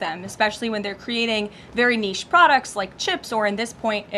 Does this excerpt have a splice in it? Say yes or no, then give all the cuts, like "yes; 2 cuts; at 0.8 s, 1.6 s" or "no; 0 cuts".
no; 0 cuts